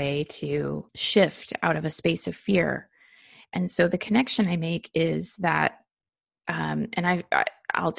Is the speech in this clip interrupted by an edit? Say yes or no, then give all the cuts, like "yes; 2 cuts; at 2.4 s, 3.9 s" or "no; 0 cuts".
yes; 1 cut; at 0.9 s